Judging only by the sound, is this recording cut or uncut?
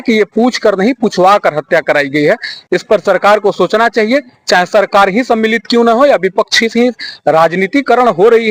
uncut